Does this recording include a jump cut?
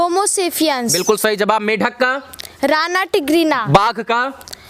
no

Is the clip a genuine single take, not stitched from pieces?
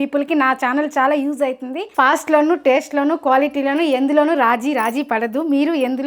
yes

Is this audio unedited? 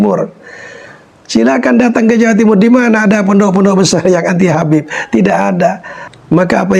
yes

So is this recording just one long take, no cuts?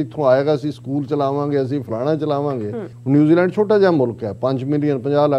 no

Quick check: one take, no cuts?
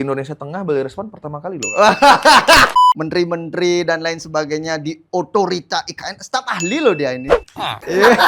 no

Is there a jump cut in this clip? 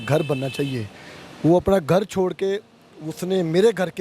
no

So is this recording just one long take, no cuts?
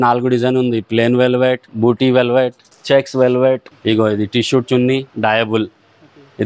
no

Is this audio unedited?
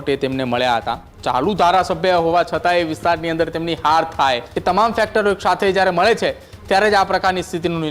no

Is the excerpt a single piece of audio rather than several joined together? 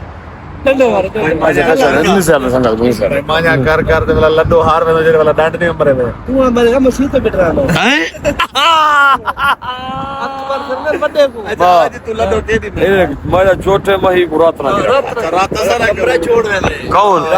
no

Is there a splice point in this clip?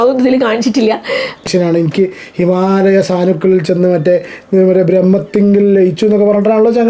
yes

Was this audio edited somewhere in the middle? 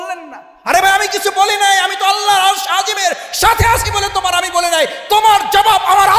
no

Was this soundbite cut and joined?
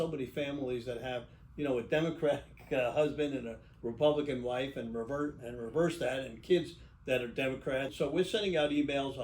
yes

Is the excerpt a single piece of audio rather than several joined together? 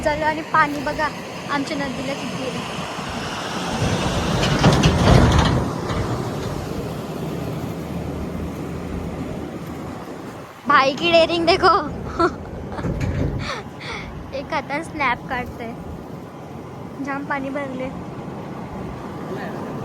yes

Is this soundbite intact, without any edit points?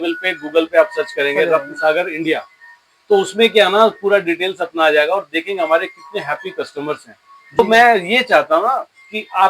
no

